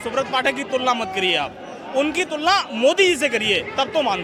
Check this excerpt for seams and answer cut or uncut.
uncut